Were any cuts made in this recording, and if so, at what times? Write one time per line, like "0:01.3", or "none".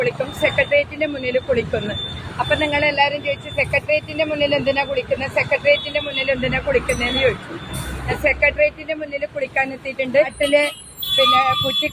0:10.3